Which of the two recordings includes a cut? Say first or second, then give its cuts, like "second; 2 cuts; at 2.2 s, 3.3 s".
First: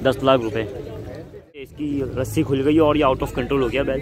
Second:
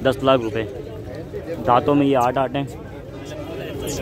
first; 1 cut; at 1.6 s